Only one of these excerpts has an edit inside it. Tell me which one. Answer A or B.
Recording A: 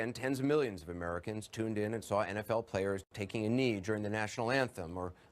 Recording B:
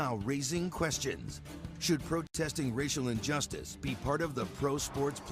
A